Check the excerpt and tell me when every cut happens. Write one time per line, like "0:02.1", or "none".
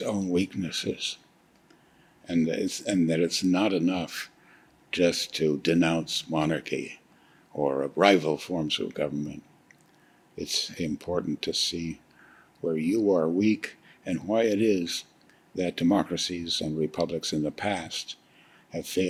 none